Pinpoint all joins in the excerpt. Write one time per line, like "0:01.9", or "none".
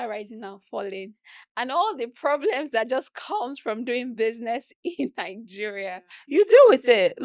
0:06.1